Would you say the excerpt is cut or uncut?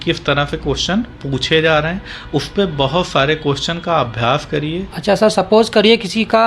cut